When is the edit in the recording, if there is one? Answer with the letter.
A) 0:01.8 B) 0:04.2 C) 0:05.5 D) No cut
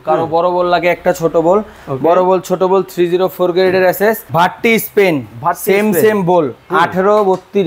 B